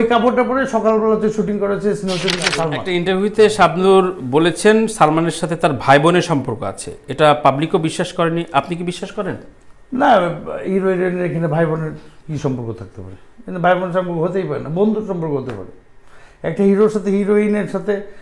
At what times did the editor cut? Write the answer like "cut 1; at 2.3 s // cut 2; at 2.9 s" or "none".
cut 1; at 2.8 s